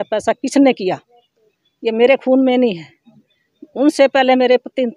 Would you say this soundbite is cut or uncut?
uncut